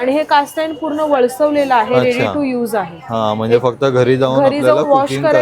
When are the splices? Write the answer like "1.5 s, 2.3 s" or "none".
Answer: none